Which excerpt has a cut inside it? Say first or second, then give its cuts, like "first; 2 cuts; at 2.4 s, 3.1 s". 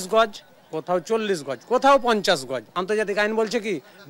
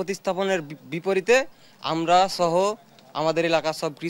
first; 1 cut; at 2.6 s